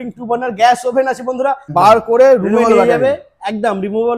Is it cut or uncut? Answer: cut